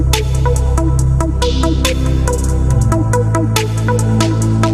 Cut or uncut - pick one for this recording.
uncut